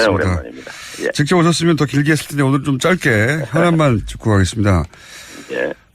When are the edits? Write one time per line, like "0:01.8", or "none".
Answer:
0:02.8